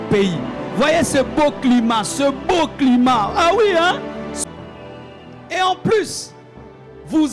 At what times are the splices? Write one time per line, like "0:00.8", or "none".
0:04.3